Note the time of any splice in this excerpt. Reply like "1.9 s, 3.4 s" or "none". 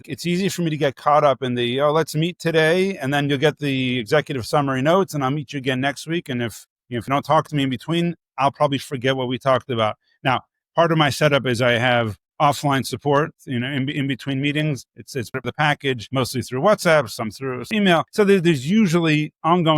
16.0 s, 18.1 s

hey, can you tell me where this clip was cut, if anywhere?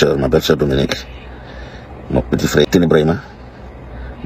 2.6 s

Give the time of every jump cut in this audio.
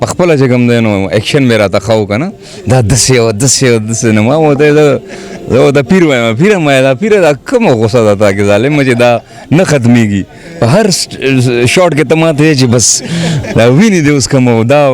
none

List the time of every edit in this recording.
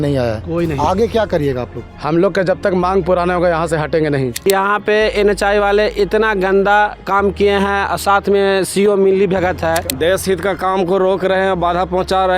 4.3 s, 9.9 s

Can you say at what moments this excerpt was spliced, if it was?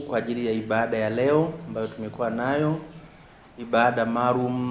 none

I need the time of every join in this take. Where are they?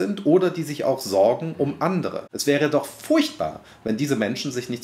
2.2 s

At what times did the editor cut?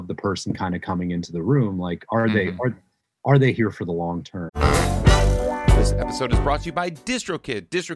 4.5 s

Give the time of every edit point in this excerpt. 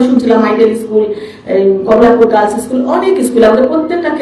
none

